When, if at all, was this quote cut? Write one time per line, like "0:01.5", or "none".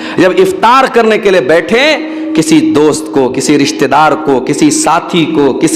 none